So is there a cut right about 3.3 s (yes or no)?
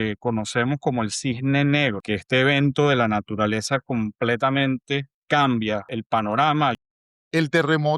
no